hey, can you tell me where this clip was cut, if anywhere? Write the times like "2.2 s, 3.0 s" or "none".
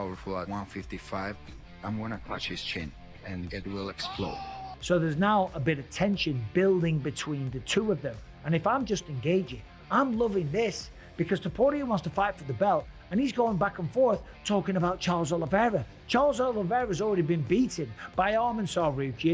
4.7 s